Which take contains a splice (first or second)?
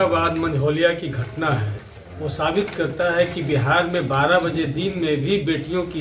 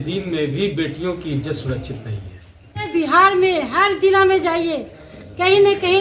second